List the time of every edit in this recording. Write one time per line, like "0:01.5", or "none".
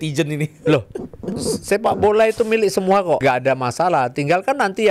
0:03.2